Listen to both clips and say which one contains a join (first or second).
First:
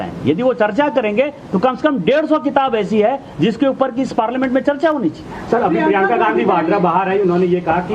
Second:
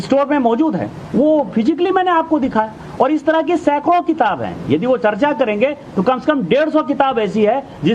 first